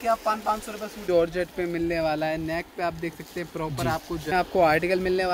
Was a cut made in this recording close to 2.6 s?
no; 2 cuts; at 1.0 s, 4.3 s

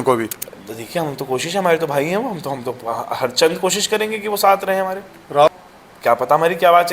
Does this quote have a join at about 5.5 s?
yes; 1 cut; at 5.5 s

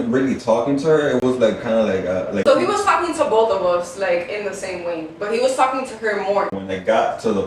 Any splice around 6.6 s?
yes; 2 cuts; at 2.4 s, 6.6 s

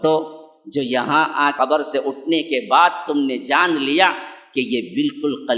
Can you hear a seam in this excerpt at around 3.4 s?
no; 1 cut; at 1.5 s

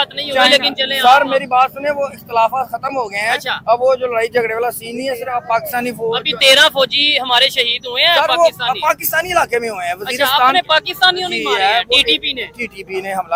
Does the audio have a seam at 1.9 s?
no; 0 cuts

